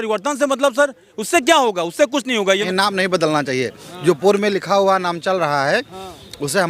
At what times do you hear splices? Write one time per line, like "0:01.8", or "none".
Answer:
0:02.6